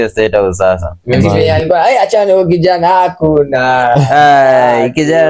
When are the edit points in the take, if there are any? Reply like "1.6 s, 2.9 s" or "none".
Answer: 1.4 s